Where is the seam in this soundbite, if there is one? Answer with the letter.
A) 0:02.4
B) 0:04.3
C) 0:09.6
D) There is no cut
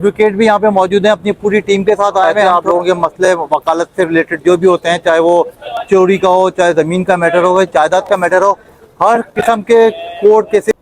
A